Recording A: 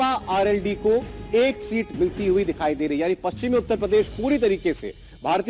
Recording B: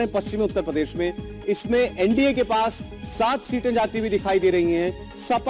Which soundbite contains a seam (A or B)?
B